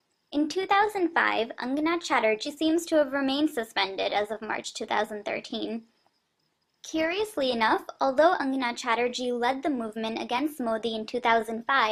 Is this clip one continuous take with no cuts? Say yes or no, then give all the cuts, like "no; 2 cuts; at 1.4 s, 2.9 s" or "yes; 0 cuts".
yes; 0 cuts